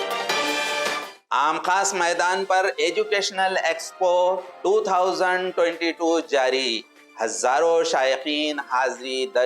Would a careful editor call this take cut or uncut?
cut